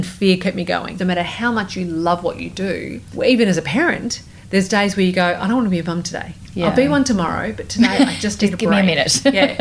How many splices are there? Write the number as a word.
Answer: one